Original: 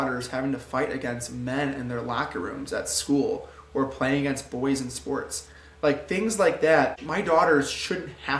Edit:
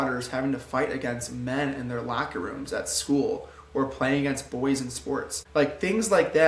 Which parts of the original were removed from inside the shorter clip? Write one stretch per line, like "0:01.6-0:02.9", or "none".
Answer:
0:05.4-0:05.6

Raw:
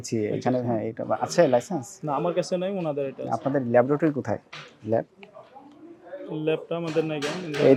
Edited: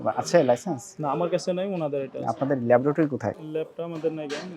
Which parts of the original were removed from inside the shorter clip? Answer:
0:04.5-0:06.3

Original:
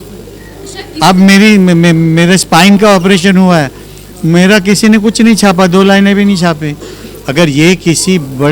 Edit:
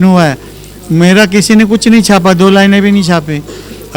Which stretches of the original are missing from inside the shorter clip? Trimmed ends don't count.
none

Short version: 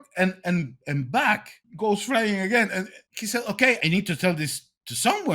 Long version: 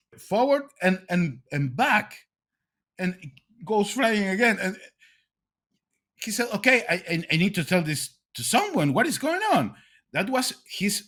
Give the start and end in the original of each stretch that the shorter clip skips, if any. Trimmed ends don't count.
0:02.2-0:03.5
0:04.9-0:06.1
0:06.8-0:07.3

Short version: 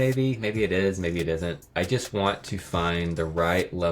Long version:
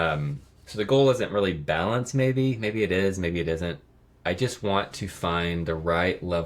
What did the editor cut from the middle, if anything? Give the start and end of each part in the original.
0:03.8-0:04.1

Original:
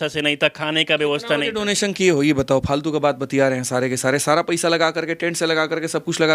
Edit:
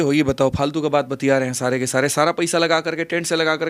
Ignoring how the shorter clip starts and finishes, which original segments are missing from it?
none

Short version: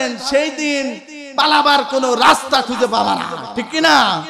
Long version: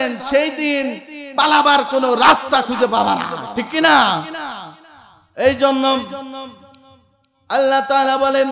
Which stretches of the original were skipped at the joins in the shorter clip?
none

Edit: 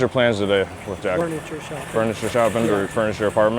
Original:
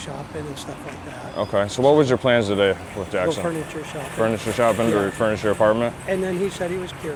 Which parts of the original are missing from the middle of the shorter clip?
0:03.3-0:03.4

